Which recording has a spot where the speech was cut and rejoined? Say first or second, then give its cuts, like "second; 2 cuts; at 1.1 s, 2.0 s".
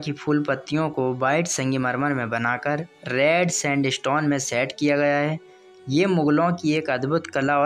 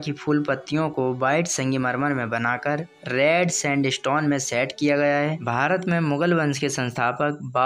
second; 1 cut; at 5.4 s